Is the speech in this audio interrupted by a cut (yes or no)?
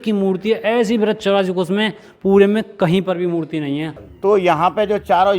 yes